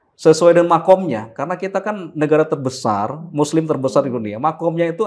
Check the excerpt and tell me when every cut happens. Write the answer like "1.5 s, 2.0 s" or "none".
none